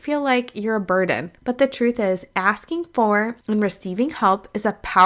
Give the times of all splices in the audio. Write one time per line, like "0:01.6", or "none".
0:01.3
0:03.4